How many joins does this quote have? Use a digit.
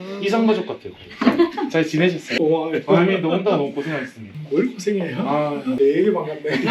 2